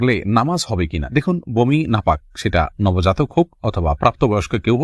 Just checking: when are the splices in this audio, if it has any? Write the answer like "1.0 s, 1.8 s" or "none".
none